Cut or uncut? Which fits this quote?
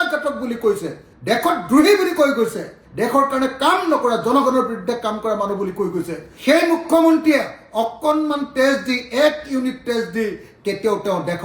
uncut